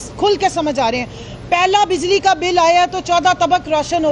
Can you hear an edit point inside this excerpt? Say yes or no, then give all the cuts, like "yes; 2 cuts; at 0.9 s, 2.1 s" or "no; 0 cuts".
no; 0 cuts